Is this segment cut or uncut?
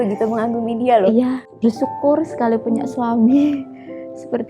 cut